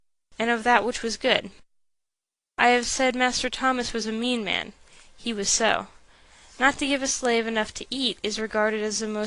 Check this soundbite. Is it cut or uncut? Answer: uncut